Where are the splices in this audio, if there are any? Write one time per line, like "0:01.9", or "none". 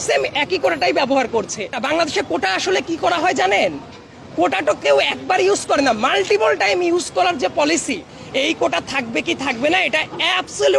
0:01.7
0:08.2